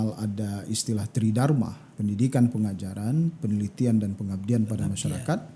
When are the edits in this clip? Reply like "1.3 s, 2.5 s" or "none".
1.8 s